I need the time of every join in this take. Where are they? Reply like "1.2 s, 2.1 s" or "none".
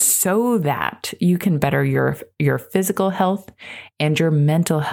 none